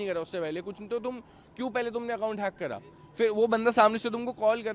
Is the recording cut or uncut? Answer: uncut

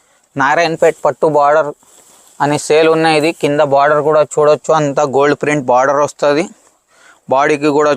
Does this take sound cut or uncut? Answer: uncut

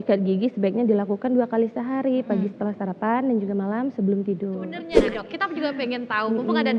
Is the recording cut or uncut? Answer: cut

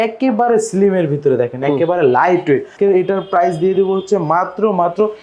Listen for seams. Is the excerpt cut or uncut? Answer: cut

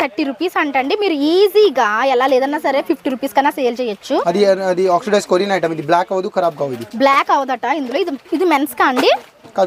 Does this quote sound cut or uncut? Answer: uncut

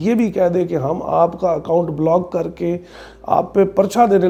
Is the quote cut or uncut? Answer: uncut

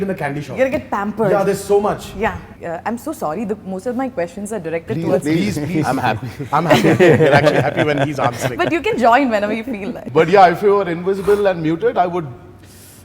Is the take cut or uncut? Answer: cut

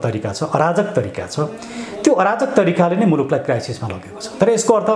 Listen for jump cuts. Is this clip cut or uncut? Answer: uncut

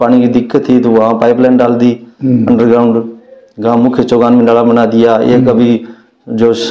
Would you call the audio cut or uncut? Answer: uncut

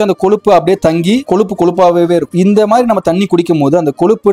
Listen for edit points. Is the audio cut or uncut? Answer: uncut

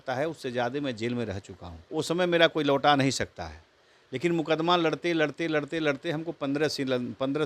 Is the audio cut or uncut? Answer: cut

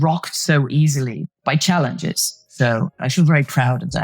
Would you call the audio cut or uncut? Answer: cut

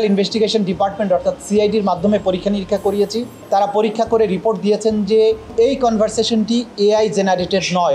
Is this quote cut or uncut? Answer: cut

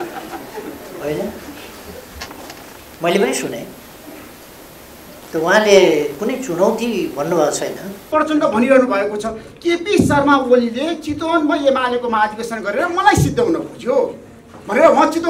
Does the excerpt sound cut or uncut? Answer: cut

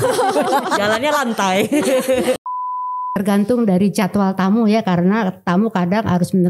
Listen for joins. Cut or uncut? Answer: cut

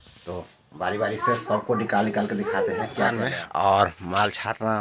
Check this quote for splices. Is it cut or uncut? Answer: cut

